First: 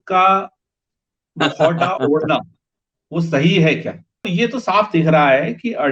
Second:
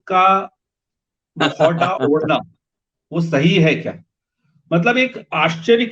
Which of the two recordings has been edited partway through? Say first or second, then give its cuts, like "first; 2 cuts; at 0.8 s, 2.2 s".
first; 1 cut; at 4.2 s